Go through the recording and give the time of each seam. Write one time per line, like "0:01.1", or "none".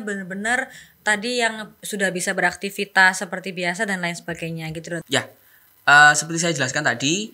0:05.0